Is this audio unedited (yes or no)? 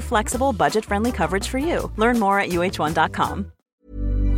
yes